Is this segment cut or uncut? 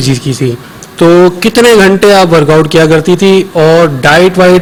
uncut